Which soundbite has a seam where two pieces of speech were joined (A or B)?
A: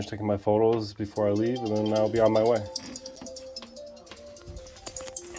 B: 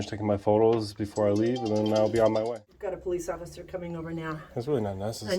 B